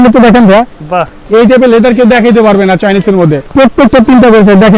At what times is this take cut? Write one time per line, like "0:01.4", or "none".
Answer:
0:01.2
0:03.4